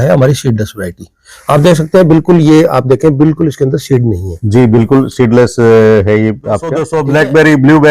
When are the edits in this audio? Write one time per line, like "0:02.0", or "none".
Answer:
0:06.9